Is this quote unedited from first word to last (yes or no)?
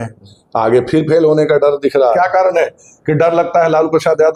no